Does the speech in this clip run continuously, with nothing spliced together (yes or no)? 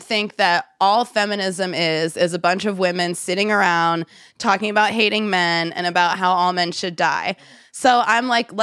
yes